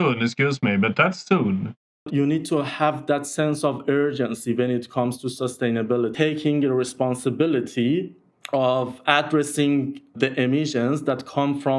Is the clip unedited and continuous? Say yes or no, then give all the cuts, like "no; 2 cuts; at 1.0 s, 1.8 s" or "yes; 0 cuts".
no; 2 cuts; at 2.1 s, 6.1 s